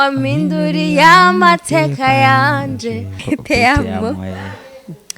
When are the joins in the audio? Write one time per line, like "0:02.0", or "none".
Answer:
0:03.2